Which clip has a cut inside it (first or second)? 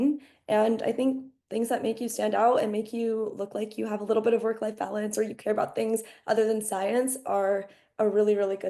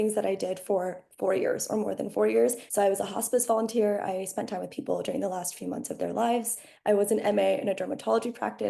second